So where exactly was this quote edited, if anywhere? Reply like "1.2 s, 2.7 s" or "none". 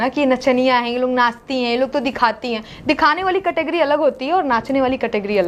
none

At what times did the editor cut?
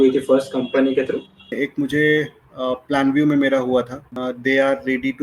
1.5 s, 4.0 s

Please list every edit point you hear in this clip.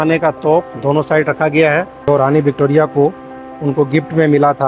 1.9 s

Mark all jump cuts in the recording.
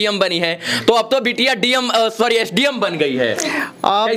none

